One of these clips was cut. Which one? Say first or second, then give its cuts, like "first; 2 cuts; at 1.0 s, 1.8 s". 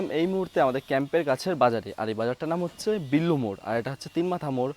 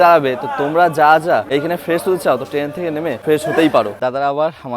second; 3 cuts; at 1.5 s, 3.2 s, 4.0 s